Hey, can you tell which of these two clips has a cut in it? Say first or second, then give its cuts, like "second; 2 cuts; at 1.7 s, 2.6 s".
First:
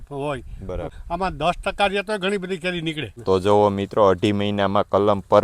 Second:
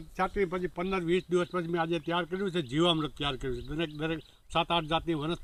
first; 2 cuts; at 0.9 s, 3.1 s